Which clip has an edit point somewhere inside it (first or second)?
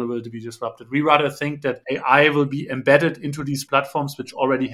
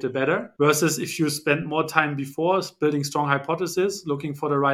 first